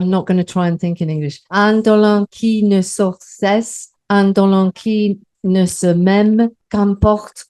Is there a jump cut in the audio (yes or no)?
yes